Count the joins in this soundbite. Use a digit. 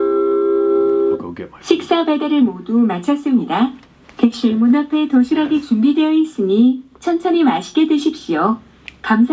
1